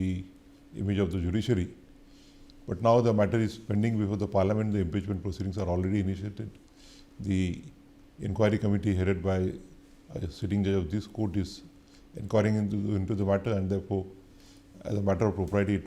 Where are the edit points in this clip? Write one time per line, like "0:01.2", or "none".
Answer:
none